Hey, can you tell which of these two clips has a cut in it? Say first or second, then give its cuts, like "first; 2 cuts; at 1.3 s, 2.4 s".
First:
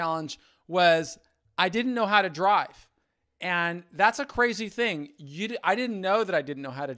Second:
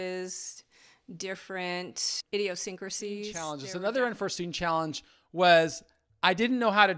second; 2 cuts; at 2.1 s, 3.6 s